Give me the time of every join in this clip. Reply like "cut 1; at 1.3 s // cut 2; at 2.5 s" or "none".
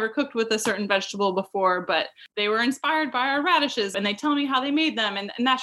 cut 1; at 2.2 s // cut 2; at 3.9 s